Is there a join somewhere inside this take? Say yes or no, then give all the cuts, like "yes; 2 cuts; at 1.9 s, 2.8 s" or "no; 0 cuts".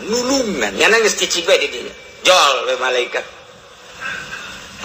no; 0 cuts